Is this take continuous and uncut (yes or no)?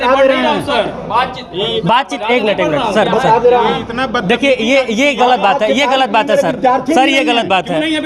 yes